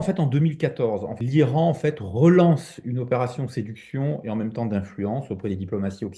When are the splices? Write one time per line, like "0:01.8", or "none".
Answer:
0:01.1

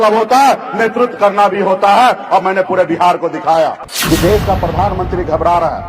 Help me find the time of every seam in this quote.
0:03.9

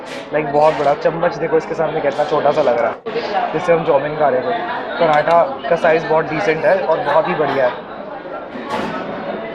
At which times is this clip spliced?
none

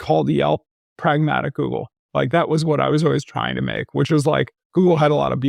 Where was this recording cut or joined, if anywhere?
none

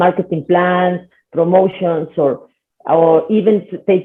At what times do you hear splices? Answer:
none

